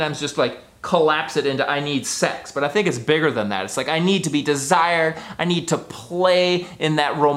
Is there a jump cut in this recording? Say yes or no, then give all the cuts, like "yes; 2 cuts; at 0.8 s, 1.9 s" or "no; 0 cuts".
no; 0 cuts